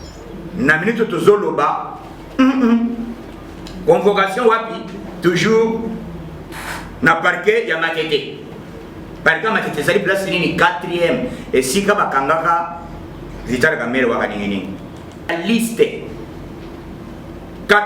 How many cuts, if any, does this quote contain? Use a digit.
1